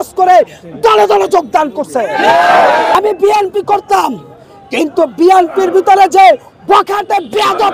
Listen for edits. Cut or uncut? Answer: cut